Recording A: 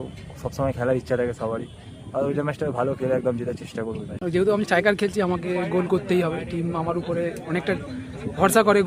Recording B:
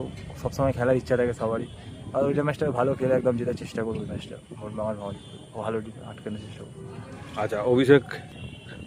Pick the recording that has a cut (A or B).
A